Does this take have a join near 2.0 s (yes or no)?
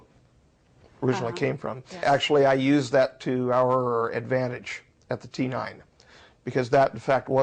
yes